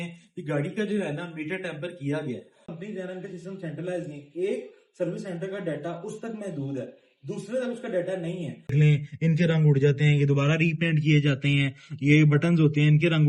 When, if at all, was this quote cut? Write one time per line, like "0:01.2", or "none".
0:02.7
0:08.7